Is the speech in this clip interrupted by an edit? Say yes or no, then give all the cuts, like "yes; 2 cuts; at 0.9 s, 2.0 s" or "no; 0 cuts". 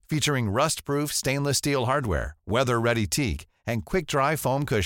no; 0 cuts